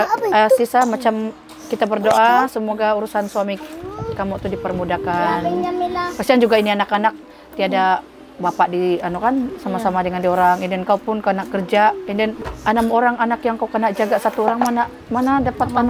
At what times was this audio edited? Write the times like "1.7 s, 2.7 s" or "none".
none